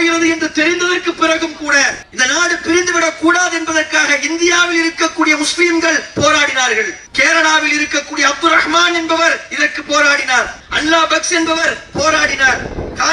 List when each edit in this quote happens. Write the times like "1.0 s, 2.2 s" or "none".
7.0 s, 10.6 s